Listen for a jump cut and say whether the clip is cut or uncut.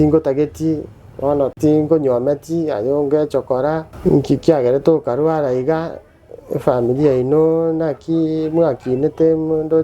cut